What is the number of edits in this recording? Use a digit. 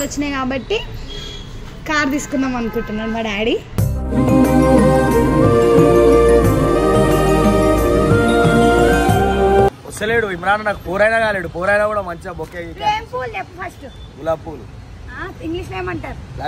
1